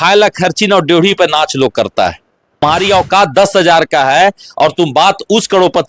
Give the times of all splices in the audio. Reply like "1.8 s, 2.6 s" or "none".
2.6 s